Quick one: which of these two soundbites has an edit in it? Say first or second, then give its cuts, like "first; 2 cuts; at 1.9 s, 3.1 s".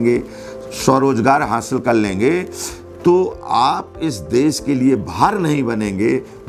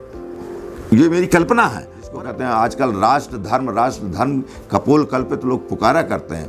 second; 1 cut; at 2.1 s